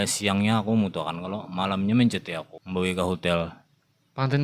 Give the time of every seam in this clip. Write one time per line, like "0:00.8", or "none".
0:02.5